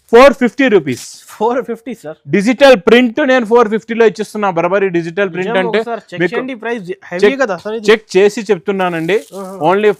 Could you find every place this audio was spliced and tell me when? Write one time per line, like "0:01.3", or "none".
none